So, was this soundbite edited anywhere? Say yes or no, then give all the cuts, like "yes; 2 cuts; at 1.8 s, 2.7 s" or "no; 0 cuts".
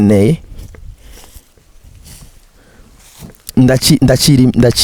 no; 0 cuts